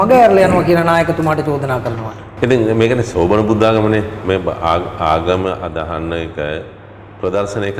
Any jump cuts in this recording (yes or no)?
no